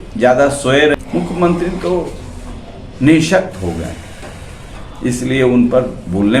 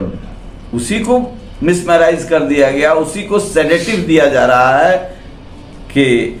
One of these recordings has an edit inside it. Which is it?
first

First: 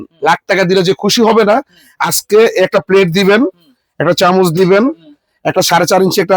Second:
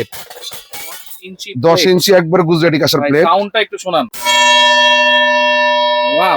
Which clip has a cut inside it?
second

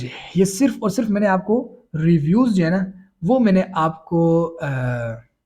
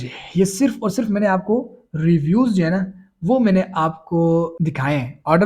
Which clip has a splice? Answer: second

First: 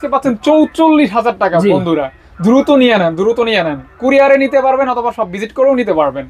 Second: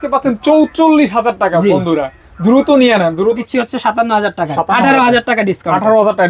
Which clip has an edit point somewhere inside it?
second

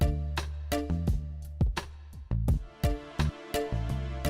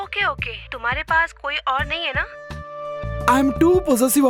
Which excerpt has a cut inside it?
first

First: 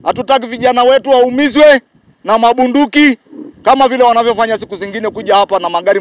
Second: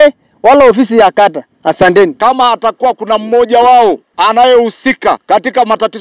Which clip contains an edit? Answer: second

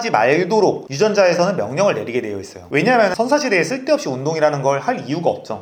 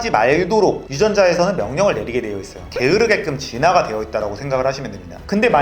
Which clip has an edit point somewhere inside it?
second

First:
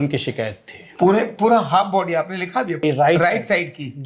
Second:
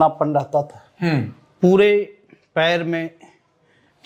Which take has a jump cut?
first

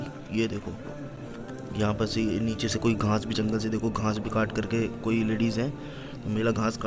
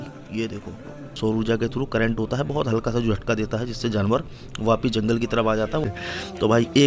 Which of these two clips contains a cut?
second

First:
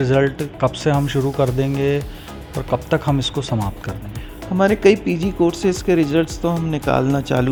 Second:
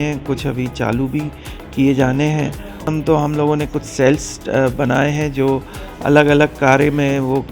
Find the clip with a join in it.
second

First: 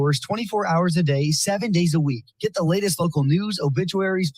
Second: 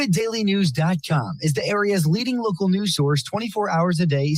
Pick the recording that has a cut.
first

